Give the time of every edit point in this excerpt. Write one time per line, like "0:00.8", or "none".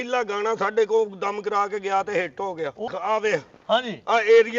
0:02.8